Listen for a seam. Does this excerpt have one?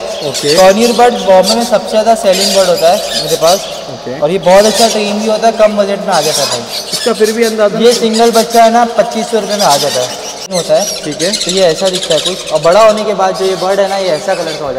yes; 1 cut; at 10.5 s

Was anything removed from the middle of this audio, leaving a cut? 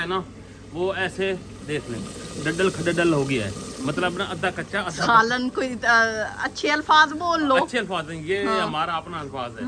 no; 0 cuts

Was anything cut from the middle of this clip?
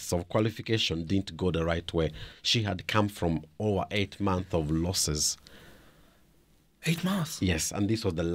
no; 0 cuts

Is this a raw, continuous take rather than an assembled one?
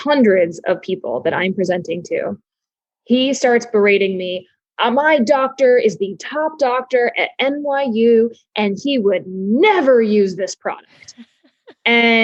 yes; 0 cuts

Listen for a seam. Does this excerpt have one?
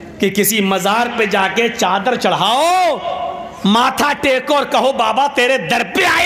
no; 0 cuts

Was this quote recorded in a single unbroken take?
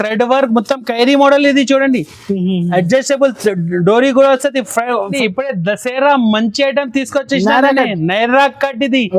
no; 1 cut; at 5.2 s

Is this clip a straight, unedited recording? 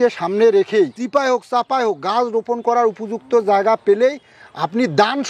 no; 1 cut; at 1.0 s

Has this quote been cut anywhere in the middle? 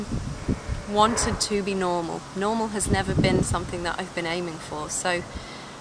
no; 0 cuts

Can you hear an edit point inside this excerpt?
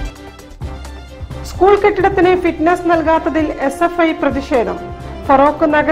yes; 1 cut; at 1.1 s

